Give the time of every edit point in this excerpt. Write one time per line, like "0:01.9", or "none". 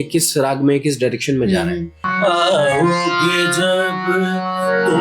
0:02.1